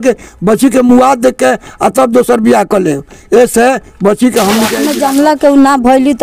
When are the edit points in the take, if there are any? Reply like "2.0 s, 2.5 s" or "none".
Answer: 4.8 s